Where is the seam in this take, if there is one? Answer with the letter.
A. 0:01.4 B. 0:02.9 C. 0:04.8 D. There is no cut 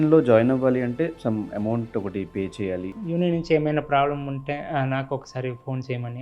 B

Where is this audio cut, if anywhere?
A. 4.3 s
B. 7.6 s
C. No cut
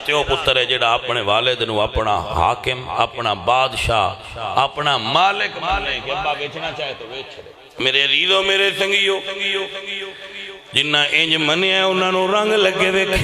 B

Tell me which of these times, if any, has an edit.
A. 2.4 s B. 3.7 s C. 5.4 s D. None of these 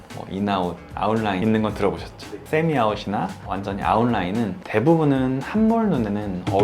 A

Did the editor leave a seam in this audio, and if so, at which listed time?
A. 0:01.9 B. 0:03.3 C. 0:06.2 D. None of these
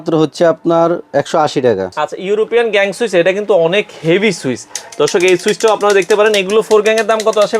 A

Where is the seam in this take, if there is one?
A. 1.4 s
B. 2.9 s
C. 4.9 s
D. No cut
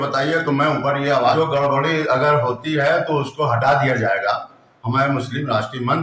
A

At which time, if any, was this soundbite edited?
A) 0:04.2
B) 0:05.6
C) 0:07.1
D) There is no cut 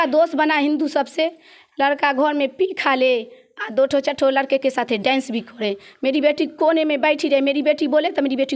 D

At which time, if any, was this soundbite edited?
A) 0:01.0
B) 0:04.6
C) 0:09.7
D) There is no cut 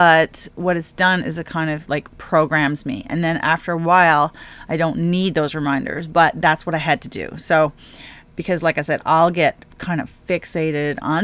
D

